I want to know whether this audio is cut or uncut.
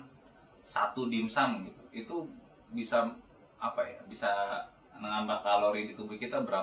uncut